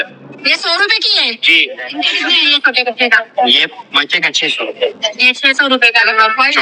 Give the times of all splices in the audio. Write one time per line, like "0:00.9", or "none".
0:02.1